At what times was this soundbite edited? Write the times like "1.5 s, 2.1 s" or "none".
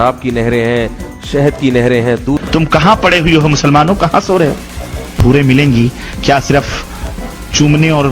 2.4 s, 5.2 s